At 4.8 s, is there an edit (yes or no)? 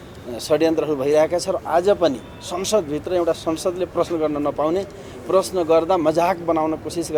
no